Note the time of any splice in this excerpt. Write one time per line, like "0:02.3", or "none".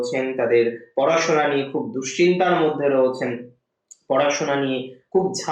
none